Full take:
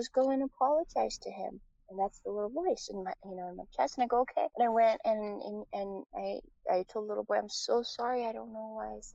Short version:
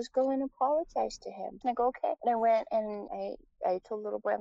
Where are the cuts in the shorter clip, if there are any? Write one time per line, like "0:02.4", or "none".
0:01.6
0:03.0